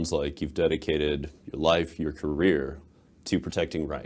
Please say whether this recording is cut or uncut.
uncut